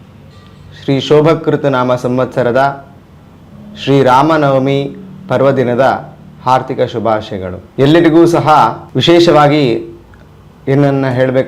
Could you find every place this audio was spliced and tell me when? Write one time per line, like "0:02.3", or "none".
0:07.6
0:08.9